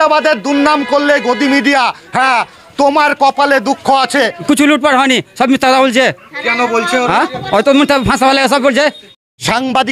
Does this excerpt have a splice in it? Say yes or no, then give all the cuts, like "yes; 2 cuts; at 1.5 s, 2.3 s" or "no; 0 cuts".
yes; 2 cuts; at 4.4 s, 9.2 s